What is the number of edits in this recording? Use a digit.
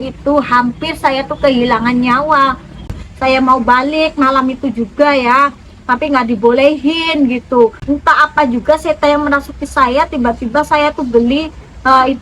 2